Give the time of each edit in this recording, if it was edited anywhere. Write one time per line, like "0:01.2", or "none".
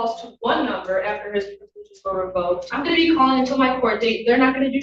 0:02.7